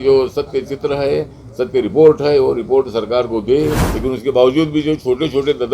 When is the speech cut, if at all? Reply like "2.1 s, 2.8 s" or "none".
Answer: 3.9 s